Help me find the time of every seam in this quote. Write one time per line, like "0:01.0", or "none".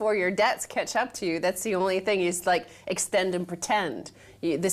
0:03.4